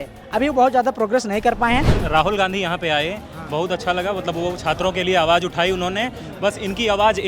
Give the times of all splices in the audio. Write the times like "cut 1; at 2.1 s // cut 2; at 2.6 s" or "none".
cut 1; at 2.0 s